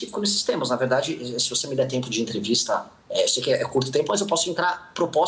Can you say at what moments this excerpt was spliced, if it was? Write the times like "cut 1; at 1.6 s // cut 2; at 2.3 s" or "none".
none